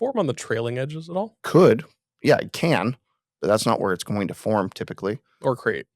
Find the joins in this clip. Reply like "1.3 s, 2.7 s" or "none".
1.4 s